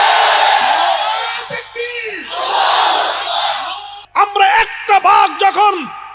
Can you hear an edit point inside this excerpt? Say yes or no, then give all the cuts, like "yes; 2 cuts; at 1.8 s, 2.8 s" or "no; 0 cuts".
yes; 1 cut; at 4.0 s